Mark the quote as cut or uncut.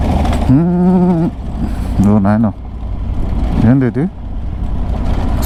uncut